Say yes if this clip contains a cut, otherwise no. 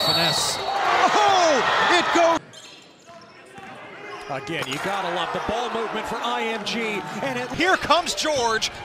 yes